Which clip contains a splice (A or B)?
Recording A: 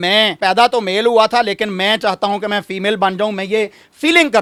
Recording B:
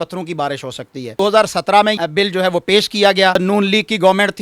B